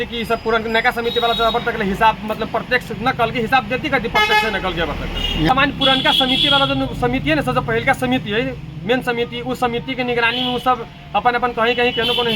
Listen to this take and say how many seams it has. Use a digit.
0